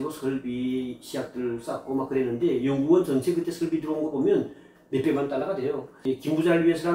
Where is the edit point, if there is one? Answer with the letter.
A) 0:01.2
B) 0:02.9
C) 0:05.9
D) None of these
C